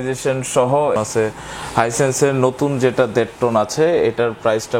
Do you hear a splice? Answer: yes; 1 cut; at 0.9 s

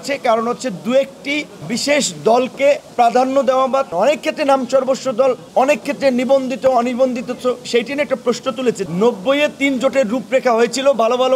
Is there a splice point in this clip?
yes; 5 cuts; at 1.5 s, 2.9 s, 3.9 s, 5.4 s, 8.8 s

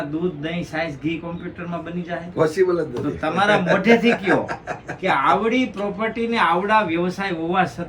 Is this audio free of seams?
yes; 0 cuts

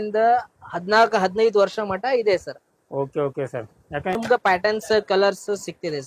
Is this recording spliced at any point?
yes; 1 cut; at 4.2 s

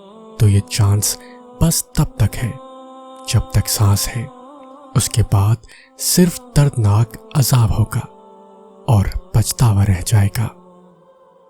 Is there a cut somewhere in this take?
yes; 1 cut; at 10.5 s

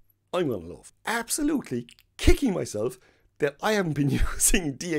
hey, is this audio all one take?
no; 1 cut; at 0.9 s

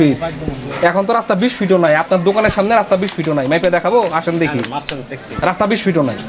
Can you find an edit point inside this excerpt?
no; 0 cuts

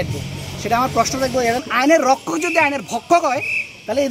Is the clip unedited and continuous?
no; 1 cut; at 1.6 s

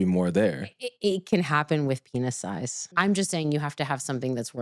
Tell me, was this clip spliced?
yes; 1 cut; at 2.9 s

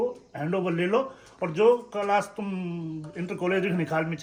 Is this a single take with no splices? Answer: yes; 0 cuts

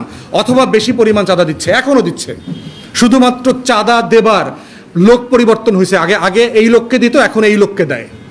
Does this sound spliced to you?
no; 0 cuts

